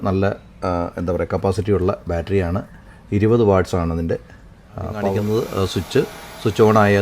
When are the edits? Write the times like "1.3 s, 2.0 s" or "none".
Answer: 5.1 s